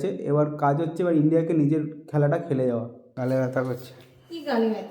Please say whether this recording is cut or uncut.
cut